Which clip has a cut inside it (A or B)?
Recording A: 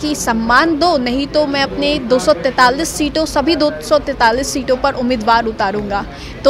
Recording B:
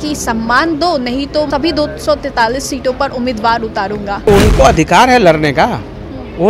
B